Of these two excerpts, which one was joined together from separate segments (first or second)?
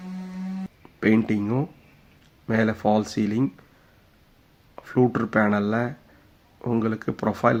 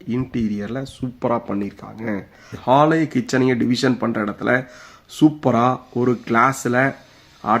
second